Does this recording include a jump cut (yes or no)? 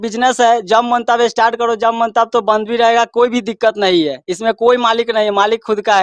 no